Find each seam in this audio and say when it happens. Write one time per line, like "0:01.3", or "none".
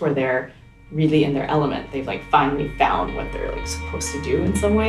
none